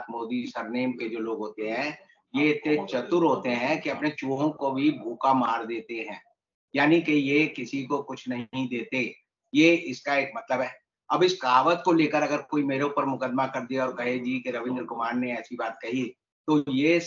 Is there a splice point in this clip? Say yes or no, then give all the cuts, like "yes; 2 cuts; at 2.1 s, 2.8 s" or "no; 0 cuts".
no; 0 cuts